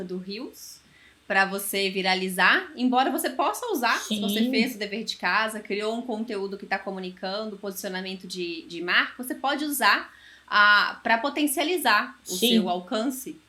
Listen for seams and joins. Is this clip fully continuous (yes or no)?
yes